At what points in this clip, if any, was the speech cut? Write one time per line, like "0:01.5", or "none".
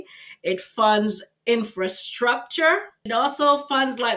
0:03.0